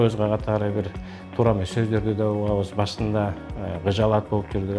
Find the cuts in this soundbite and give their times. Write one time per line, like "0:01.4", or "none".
none